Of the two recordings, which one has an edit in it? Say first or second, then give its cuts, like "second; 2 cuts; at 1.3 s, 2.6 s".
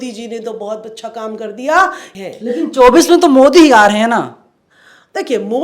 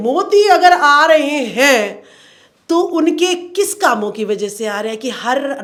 first; 1 cut; at 2.2 s